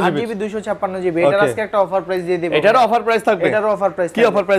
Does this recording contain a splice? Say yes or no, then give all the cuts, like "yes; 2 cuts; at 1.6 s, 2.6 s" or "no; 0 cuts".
no; 0 cuts